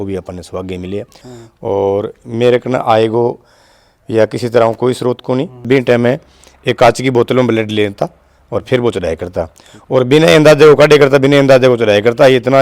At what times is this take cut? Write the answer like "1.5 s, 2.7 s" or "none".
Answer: 1.3 s, 5.7 s